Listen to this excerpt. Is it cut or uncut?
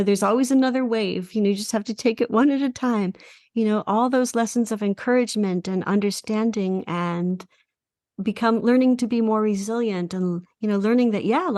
uncut